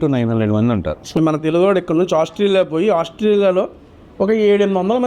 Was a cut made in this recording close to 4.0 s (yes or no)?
no